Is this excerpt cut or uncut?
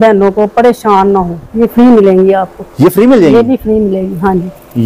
cut